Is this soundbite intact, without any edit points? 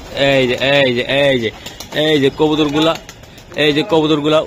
yes; 0 cuts

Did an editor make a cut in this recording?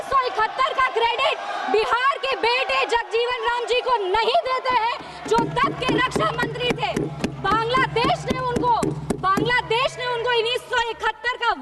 no; 0 cuts

